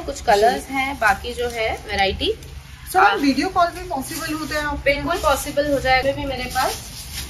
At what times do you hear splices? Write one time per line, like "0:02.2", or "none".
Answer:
0:06.0

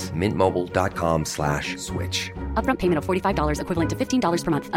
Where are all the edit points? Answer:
none

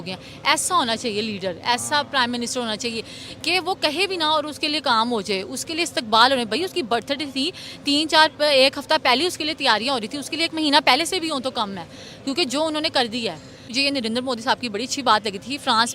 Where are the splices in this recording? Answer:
0:13.7

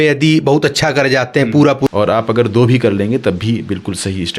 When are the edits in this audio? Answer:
0:01.9

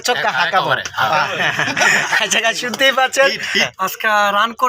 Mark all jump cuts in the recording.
0:03.7

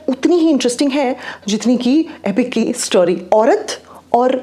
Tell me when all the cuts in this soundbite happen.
0:03.2

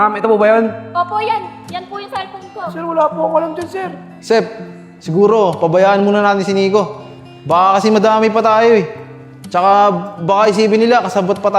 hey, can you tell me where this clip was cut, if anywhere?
0:04.1

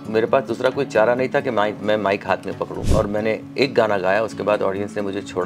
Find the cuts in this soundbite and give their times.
0:02.8

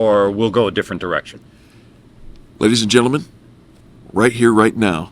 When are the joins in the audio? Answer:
0:01.3

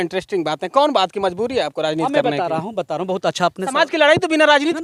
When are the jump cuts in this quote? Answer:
none

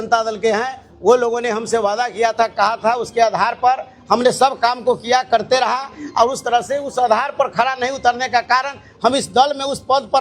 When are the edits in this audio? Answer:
none

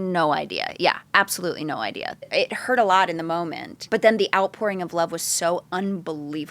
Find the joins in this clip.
0:02.3
0:03.8

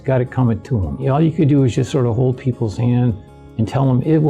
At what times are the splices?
0:01.0

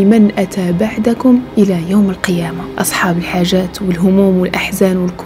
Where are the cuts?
0:02.6

